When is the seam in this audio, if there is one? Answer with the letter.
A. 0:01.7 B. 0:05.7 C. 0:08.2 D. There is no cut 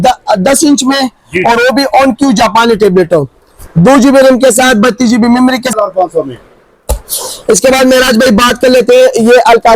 B